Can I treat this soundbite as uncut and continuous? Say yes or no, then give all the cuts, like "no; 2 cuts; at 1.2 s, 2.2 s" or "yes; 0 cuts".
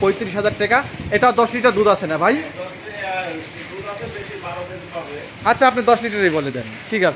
yes; 0 cuts